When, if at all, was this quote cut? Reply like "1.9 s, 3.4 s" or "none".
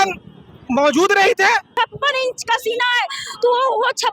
1.7 s